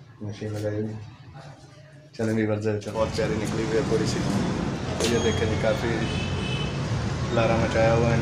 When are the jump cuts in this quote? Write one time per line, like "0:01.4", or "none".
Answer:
0:02.9